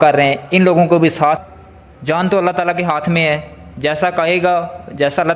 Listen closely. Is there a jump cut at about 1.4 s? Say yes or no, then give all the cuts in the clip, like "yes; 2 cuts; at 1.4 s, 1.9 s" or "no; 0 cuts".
yes; 1 cut; at 1.4 s